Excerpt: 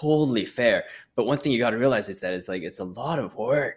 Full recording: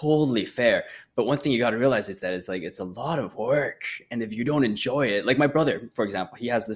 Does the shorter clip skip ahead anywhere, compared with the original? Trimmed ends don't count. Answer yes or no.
no